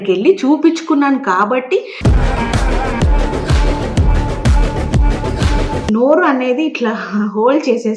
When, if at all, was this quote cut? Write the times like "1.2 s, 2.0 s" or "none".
5.8 s